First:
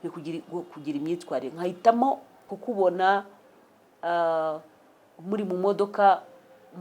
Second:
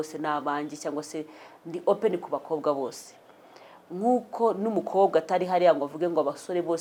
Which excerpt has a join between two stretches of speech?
first; 1 cut; at 2.5 s

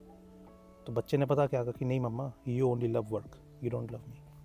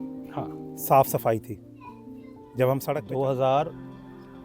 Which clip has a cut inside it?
second; 1 cut; at 3.0 s

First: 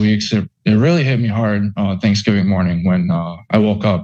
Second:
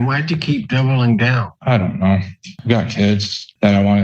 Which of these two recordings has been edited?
second; 2 cuts; at 1.4 s, 2.5 s

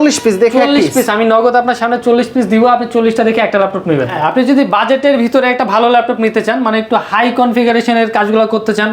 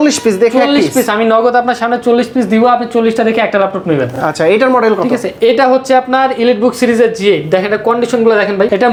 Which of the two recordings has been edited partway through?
first; 1 cut; at 4.1 s

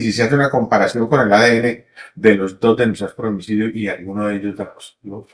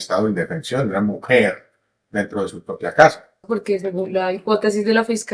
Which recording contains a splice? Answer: second; 1 cut; at 3.4 s

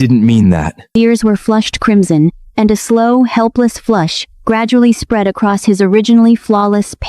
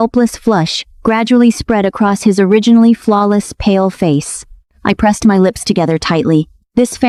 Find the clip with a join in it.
first; 1 cut; at 0.9 s

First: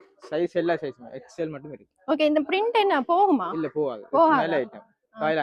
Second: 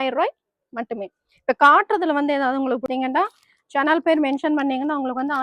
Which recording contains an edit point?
second; 1 cut; at 2.9 s

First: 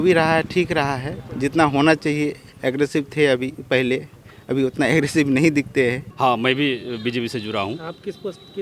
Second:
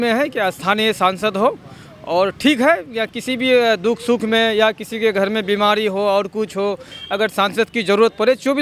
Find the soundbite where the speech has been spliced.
first; 1 cut; at 6.1 s

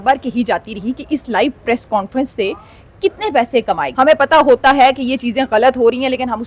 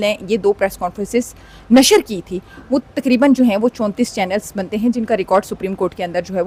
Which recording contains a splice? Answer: first; 1 cut; at 3.9 s

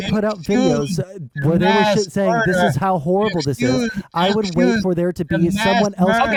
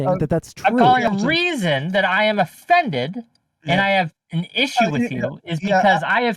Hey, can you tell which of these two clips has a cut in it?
second; 1 cut; at 1.1 s

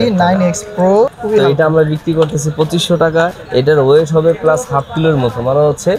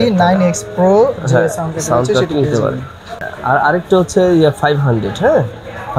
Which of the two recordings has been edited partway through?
first; 2 cuts; at 1.2 s, 3.4 s

